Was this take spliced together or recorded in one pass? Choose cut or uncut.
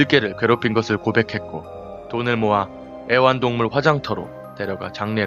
cut